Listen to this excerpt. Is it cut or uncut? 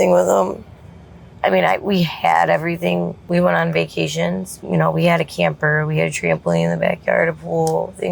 cut